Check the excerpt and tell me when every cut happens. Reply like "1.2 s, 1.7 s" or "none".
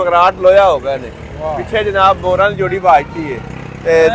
none